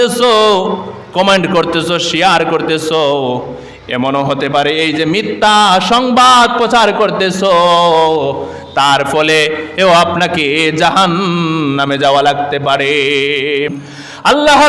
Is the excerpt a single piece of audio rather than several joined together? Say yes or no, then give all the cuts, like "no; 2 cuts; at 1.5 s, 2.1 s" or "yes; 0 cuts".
no; 1 cut; at 13.7 s